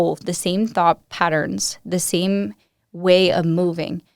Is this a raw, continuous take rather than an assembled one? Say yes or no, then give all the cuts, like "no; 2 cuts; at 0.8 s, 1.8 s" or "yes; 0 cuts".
no; 1 cut; at 1.1 s